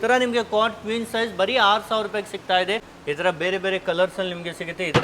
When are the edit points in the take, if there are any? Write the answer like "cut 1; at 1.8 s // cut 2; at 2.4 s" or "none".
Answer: cut 1; at 2.9 s

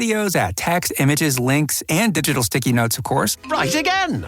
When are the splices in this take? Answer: cut 1; at 3.4 s

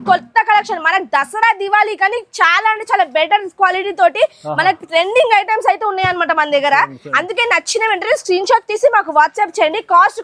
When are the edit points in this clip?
none

